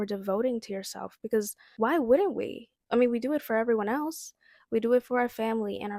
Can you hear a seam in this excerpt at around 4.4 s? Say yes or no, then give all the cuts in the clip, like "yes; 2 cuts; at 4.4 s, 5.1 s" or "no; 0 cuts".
no; 1 cut; at 1.6 s